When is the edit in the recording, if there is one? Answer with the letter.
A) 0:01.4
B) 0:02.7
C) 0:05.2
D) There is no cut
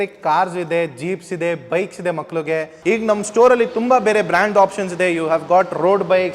B